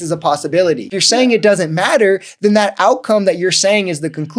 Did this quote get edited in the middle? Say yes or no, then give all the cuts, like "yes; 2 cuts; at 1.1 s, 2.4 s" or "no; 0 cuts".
yes; 1 cut; at 1.0 s